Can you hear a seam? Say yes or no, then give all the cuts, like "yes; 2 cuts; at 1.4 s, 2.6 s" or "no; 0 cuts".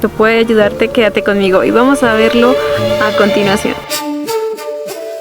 yes; 1 cut; at 3.9 s